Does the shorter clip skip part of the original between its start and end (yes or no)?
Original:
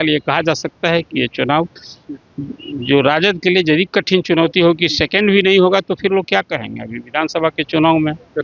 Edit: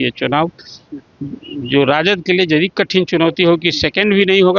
no